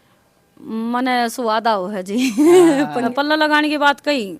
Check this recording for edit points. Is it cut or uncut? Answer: cut